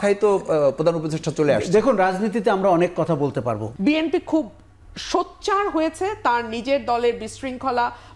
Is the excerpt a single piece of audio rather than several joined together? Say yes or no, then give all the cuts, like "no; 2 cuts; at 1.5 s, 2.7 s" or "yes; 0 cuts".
no; 1 cut; at 3.6 s